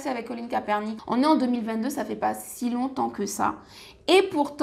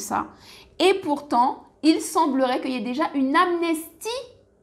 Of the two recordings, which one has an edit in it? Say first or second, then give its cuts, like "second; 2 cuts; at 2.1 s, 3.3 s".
first; 1 cut; at 0.9 s